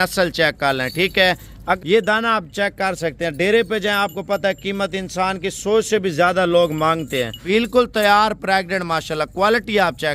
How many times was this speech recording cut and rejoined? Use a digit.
2